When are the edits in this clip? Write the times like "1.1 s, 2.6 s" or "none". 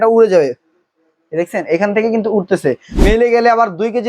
2.9 s